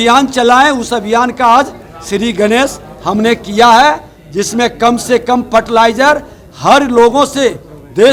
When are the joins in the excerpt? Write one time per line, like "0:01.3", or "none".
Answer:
none